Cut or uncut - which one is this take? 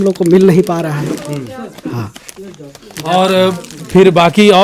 uncut